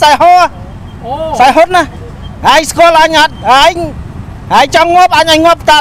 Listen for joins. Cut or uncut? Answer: uncut